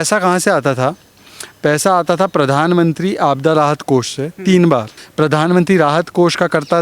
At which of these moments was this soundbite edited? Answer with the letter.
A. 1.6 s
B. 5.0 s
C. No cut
B